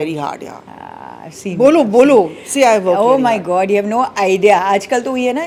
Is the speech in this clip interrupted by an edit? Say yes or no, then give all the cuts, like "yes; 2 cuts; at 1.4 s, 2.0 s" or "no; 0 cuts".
no; 0 cuts